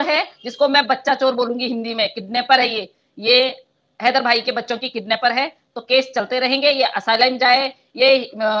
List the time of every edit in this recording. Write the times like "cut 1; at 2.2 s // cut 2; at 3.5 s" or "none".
none